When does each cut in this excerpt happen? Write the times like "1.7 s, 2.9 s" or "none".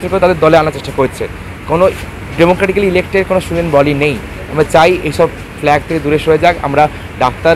none